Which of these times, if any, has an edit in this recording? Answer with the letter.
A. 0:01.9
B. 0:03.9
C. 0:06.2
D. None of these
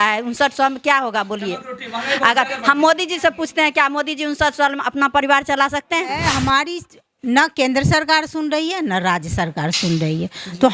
C